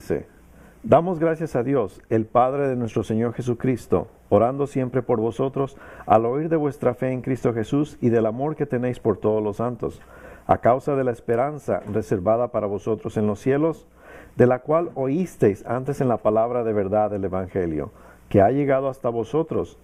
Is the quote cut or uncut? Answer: uncut